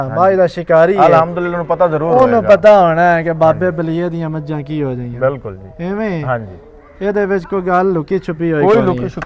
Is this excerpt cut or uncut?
uncut